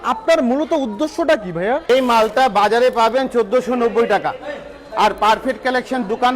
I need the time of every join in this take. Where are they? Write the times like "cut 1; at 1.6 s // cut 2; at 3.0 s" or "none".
cut 1; at 1.8 s